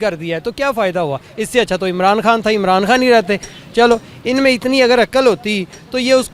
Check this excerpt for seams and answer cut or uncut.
uncut